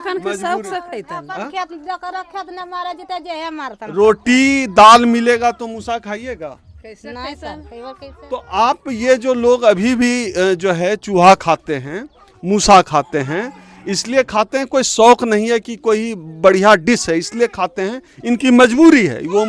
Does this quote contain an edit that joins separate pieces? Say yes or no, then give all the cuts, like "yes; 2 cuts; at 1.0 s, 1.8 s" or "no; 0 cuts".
no; 0 cuts